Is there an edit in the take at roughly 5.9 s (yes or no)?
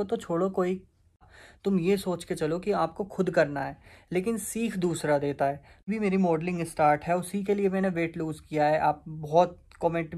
yes